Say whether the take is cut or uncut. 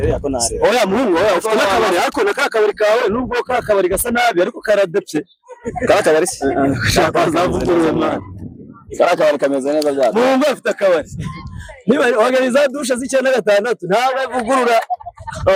uncut